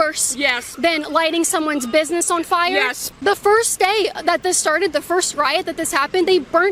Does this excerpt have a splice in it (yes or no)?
yes